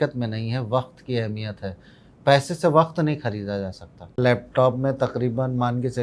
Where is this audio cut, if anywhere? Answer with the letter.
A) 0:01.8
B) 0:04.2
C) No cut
B